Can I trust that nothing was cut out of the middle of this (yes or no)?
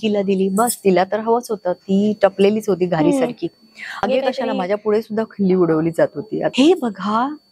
no